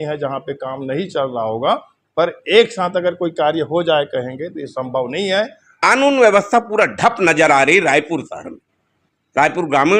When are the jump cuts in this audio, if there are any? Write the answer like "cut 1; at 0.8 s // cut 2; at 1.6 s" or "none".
cut 1; at 5.6 s